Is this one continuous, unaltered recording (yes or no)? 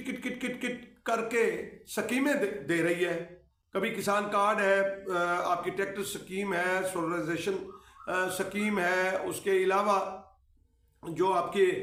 yes